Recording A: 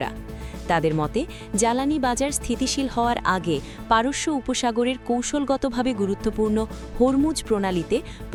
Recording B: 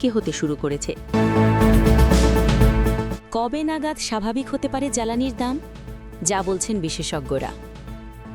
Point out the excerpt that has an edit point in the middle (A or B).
B